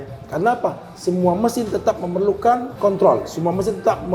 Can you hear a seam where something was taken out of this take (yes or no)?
yes